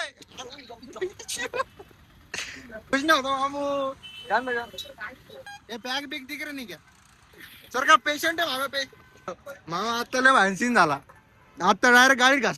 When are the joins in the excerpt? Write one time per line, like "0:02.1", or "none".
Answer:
0:02.9
0:05.5
0:09.4